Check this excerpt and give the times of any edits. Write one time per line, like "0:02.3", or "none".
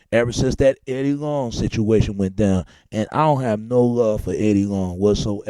0:03.1